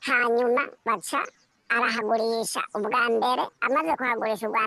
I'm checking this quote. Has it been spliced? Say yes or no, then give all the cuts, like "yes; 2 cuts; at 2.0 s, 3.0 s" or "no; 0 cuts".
no; 0 cuts